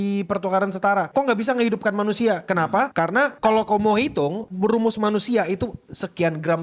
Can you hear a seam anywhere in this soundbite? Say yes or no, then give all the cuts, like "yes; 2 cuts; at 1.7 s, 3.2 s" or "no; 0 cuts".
yes; 3 cuts; at 1.1 s, 2.6 s, 4.4 s